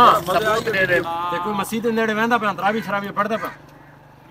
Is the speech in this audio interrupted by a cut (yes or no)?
yes